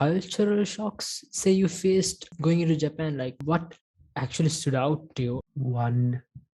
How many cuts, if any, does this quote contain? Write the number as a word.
three